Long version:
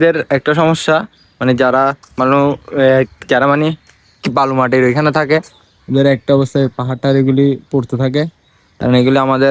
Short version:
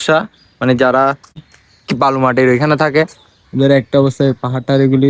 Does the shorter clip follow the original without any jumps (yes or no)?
no